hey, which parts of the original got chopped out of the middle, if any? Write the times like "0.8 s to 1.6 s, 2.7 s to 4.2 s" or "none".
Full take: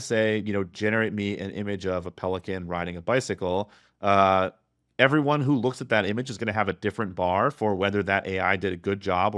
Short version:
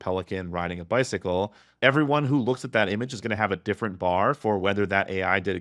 3.8 s to 4.8 s